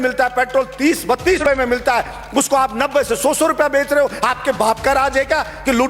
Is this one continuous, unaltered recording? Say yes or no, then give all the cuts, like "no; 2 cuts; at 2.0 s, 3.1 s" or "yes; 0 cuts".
no; 1 cut; at 1.4 s